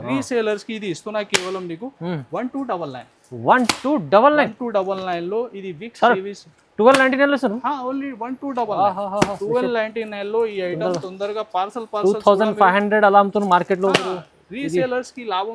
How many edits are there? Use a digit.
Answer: 0